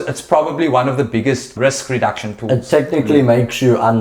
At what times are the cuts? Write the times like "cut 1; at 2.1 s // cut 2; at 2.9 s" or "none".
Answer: cut 1; at 1.5 s